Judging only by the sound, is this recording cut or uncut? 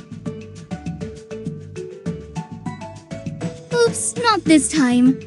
cut